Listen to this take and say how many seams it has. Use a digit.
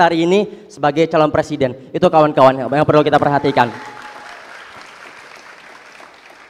0